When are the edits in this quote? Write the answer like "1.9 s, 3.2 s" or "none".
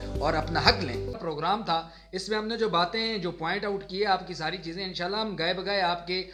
none